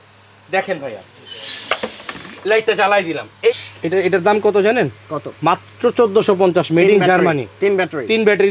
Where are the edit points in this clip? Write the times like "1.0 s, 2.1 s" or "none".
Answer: 3.5 s

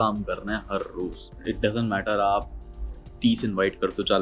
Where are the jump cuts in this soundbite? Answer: 1.2 s

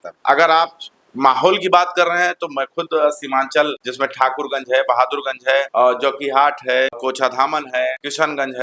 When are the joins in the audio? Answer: none

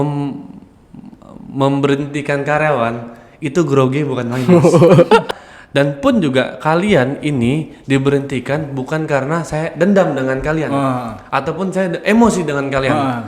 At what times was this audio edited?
5.3 s

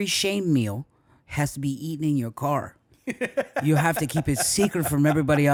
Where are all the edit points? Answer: none

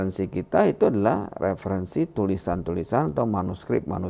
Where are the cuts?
none

